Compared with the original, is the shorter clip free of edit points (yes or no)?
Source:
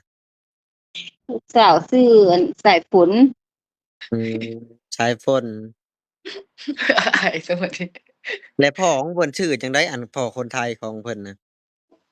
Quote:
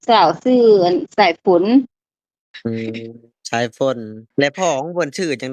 no